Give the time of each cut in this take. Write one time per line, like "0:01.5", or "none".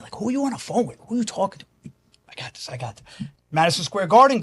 0:03.2